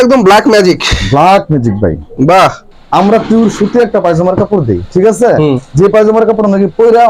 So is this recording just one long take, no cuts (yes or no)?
no